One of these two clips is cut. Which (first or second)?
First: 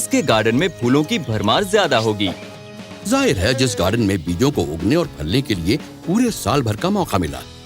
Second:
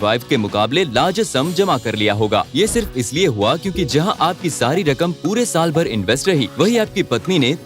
first